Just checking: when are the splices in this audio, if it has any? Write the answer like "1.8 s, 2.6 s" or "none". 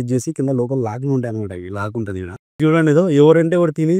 2.6 s